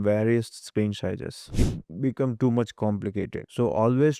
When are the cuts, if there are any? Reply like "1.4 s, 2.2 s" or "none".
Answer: 1.5 s